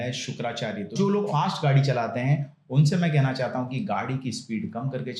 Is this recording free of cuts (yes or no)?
no